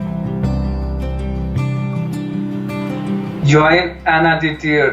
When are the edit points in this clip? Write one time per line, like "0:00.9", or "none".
0:03.4